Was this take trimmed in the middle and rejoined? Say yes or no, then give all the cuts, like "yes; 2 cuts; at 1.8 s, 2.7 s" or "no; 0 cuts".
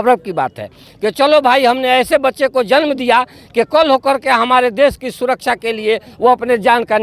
no; 0 cuts